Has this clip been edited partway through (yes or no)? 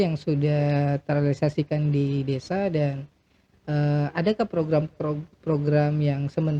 no